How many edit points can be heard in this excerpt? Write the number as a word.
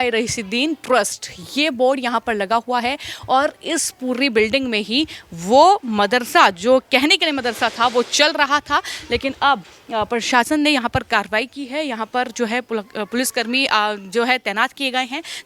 zero